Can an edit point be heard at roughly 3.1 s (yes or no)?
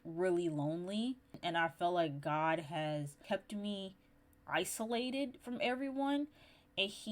yes